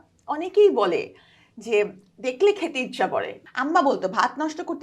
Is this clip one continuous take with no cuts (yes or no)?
no